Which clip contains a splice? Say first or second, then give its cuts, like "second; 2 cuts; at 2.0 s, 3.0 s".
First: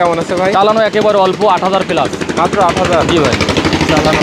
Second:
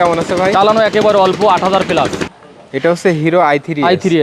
second; 1 cut; at 2.2 s